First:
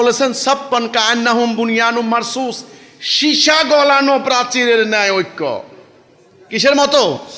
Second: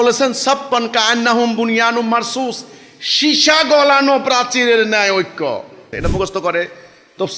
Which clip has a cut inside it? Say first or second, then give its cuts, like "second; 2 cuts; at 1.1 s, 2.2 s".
second; 1 cut; at 6.0 s